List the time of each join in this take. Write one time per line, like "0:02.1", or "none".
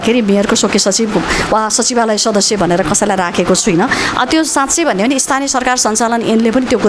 none